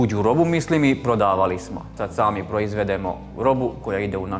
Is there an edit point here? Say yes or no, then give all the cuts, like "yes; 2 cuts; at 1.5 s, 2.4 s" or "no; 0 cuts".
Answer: yes; 1 cut; at 1.9 s